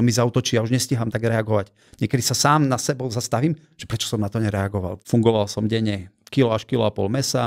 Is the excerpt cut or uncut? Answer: cut